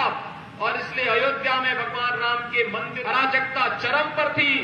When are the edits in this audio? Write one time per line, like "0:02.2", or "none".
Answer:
0:03.0